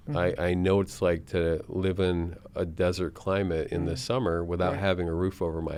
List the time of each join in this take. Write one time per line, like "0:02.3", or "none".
none